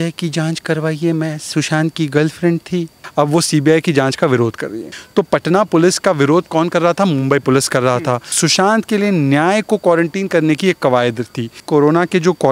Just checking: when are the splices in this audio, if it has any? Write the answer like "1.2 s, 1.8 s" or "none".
3.0 s, 5.0 s, 8.4 s, 11.6 s